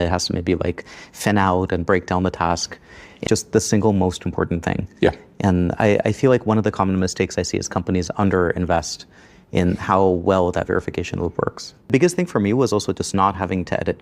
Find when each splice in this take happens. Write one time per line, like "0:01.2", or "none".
0:03.2
0:11.9